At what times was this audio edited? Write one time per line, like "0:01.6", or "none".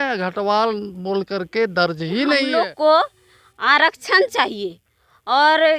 0:02.5